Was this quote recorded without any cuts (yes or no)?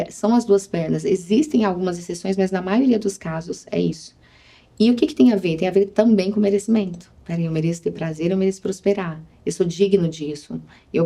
yes